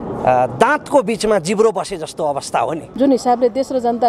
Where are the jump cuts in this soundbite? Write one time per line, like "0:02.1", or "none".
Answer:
0:02.9

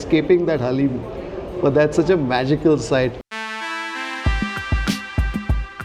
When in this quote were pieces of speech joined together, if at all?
0:03.2

